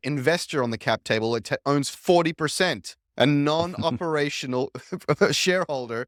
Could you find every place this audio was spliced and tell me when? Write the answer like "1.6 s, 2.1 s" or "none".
none